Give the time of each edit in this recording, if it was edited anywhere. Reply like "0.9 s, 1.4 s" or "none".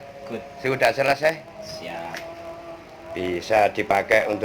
1.2 s